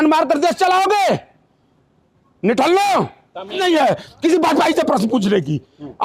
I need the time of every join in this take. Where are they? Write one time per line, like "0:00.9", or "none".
0:03.4

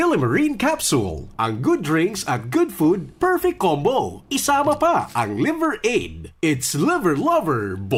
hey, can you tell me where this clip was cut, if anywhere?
none

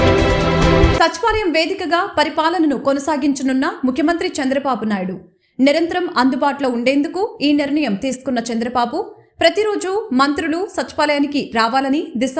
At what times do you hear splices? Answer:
0:00.9

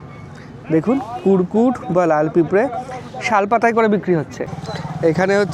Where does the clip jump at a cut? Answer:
0:04.4

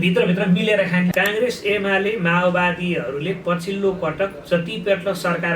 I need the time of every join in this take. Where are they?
0:01.1

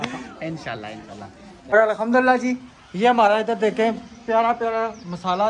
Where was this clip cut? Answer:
0:01.7

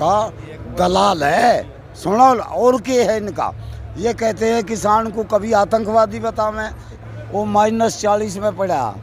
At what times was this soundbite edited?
0:06.9

